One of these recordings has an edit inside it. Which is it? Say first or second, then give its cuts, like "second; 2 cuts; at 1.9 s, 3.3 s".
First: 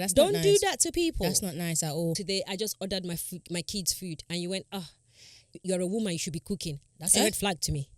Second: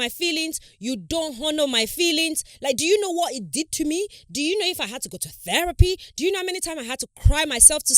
first; 2 cuts; at 2.2 s, 5.6 s